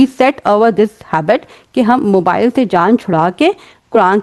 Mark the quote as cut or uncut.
uncut